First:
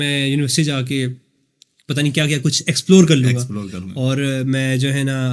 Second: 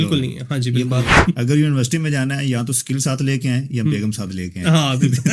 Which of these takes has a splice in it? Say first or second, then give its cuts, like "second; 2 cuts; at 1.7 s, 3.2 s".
second; 1 cut; at 1.1 s